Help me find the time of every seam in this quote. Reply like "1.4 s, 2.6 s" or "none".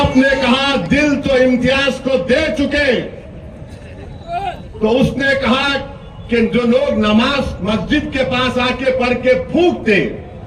none